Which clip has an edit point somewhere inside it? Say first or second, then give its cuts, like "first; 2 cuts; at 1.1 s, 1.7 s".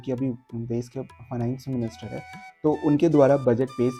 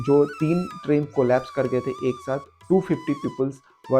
second; 1 cut; at 2.5 s